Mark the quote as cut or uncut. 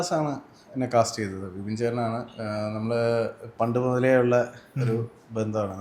uncut